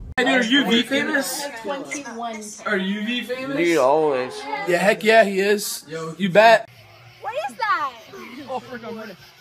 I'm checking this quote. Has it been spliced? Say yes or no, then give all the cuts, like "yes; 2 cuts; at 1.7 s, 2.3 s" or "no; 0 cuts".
yes; 1 cut; at 6.6 s